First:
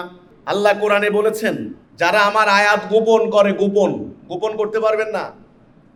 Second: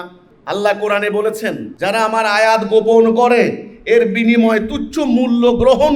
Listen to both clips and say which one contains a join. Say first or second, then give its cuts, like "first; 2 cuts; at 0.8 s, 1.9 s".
second; 1 cut; at 1.7 s